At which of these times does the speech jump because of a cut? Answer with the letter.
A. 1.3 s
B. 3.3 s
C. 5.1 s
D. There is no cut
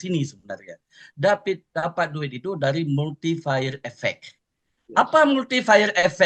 D